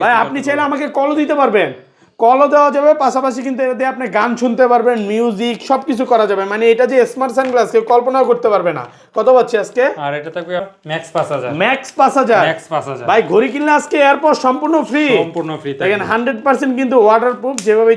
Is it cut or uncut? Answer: cut